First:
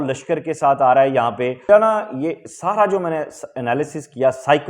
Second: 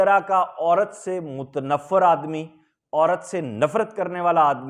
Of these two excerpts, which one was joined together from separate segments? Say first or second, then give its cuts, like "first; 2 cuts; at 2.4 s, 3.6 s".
first; 1 cut; at 1.7 s